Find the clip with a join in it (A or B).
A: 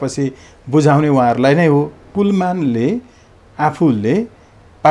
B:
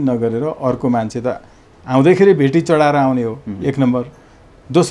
A